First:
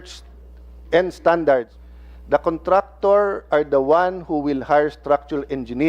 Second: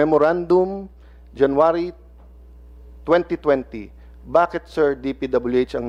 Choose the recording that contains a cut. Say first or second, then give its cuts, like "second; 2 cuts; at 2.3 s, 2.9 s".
first; 1 cut; at 1.8 s